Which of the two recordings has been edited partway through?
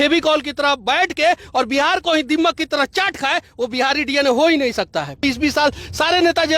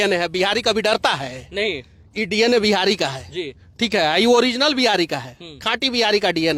first; 1 cut; at 5.2 s

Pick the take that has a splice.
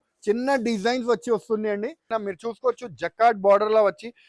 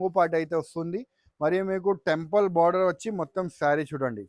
first; 1 cut; at 2.0 s

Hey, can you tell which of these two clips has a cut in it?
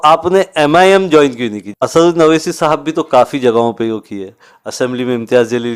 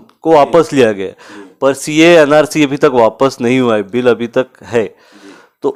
first; 1 cut; at 1.8 s

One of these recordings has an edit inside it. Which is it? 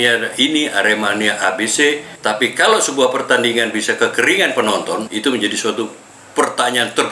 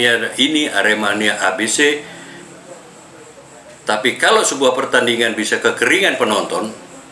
first; 2 cuts; at 2.1 s, 5.1 s

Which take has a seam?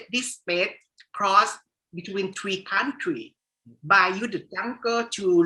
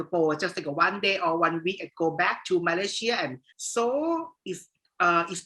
second; 1 cut; at 3.4 s

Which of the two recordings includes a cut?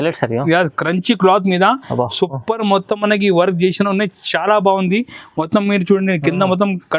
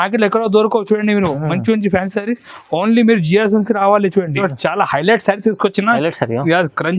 second; 1 cut; at 4.4 s

